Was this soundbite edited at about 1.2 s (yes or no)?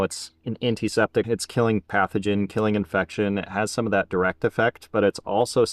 yes